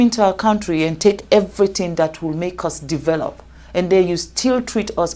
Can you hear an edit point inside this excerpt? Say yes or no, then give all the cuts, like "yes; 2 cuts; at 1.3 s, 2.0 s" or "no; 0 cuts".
no; 0 cuts